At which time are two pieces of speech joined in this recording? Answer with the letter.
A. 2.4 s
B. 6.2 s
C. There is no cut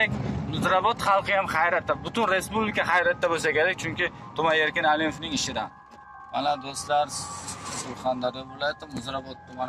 B